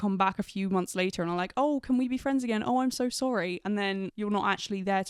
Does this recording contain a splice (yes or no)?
no